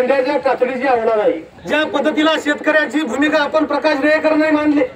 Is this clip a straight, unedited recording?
no; 1 cut; at 1.5 s

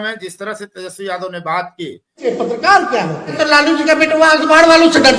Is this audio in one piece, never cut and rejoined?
no; 2 cuts; at 2.2 s, 3.4 s

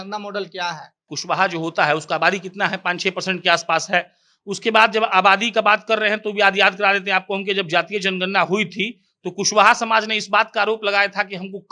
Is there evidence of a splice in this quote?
yes; 1 cut; at 1.1 s

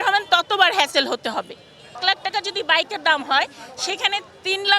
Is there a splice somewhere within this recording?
yes; 1 cut; at 2.0 s

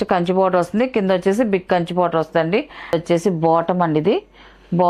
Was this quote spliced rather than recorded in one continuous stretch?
yes; 1 cut; at 2.9 s

